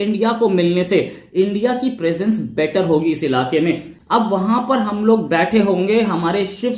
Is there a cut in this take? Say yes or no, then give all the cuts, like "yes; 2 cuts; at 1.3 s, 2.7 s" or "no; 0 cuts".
yes; 1 cut; at 3.9 s